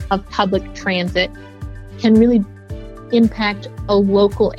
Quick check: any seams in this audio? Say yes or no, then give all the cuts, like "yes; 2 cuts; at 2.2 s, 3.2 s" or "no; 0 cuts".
no; 0 cuts